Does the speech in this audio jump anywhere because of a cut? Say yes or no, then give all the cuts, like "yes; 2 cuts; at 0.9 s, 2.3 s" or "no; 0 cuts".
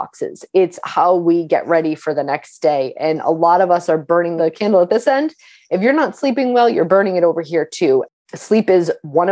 yes; 2 cuts; at 4.3 s, 8.1 s